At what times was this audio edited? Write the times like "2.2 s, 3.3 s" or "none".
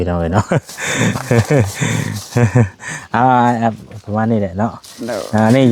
none

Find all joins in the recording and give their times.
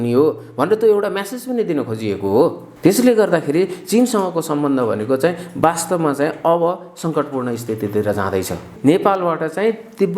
2.7 s, 8.7 s

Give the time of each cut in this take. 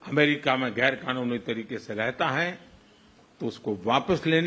none

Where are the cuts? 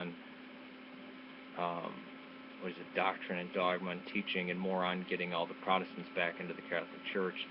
none

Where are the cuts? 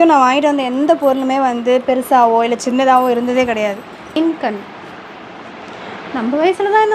4.2 s

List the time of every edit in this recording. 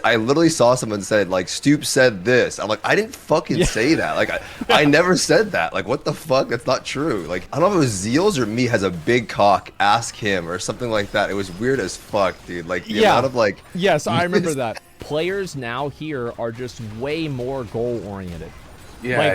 7.4 s, 15.0 s

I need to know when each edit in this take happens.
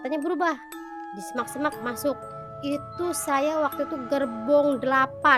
none

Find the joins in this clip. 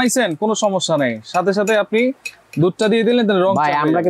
none

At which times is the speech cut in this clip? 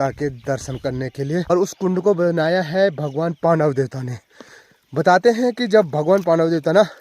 1.5 s

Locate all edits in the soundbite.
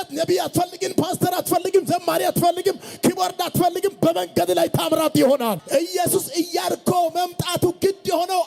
5.6 s

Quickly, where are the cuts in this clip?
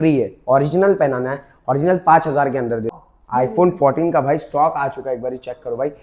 2.9 s

